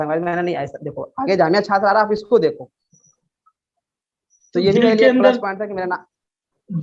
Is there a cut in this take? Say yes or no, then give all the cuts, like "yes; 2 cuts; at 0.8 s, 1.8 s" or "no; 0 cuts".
no; 0 cuts